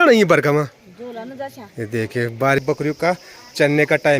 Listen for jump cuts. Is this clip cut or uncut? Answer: cut